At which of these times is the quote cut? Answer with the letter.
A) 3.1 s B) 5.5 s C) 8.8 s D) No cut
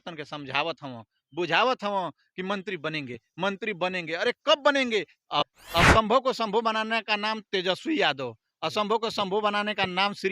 B